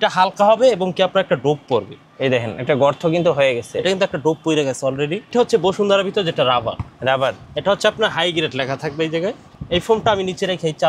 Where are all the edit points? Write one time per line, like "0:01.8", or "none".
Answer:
0:05.3